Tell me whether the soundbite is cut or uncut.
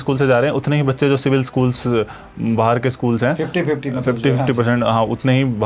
uncut